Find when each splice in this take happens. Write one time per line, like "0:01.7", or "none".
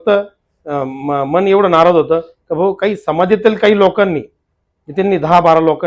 none